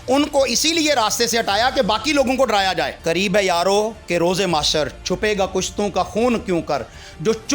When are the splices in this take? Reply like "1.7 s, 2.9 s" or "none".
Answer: 2.9 s